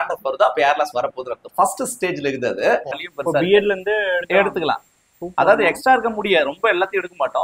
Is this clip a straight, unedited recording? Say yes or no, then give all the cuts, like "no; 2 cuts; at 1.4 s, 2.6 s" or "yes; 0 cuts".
no; 1 cut; at 3.0 s